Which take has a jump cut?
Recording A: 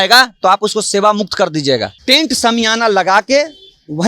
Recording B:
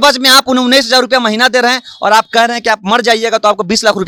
A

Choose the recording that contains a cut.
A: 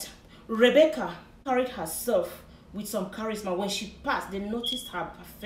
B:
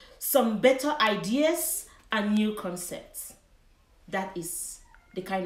A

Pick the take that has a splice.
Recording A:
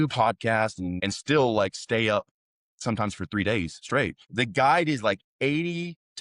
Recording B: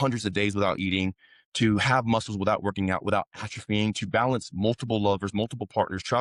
A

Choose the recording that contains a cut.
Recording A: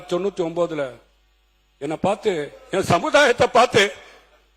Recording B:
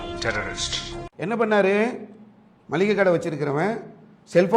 B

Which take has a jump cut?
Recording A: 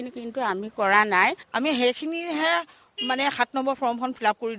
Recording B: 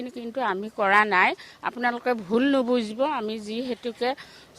A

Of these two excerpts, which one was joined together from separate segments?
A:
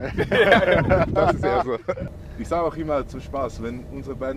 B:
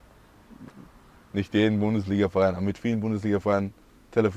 A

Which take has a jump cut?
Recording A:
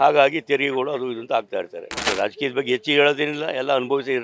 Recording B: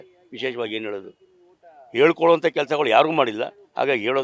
A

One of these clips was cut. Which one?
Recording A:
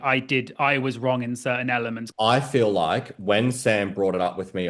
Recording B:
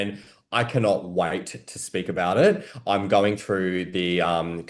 A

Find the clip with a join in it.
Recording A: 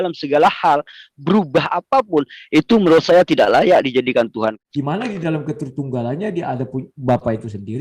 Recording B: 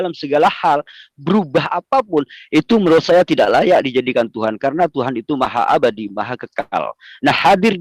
A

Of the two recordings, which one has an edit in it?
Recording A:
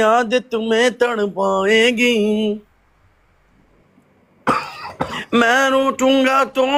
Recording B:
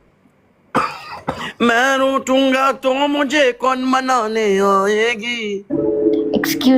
B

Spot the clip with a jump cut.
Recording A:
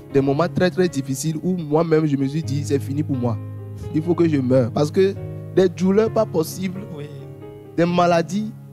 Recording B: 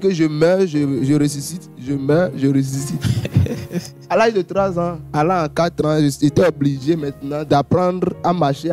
B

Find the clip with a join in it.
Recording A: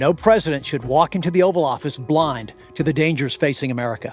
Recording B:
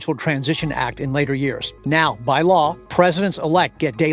B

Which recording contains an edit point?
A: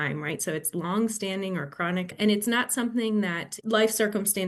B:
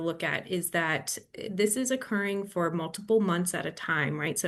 A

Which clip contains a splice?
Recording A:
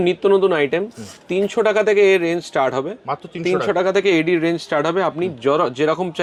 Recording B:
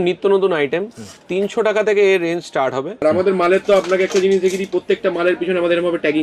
B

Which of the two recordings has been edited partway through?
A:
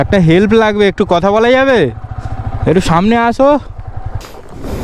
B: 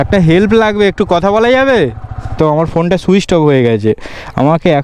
B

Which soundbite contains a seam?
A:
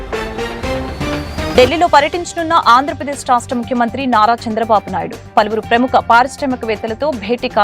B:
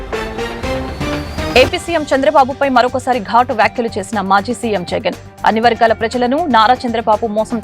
B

